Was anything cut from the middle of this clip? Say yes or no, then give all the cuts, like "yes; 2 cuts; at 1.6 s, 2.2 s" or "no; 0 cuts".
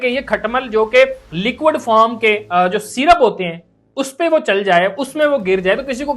yes; 1 cut; at 1.2 s